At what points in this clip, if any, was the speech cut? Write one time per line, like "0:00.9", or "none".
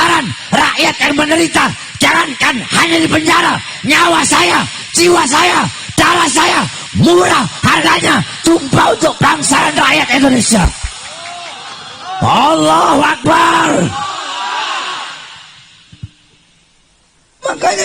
none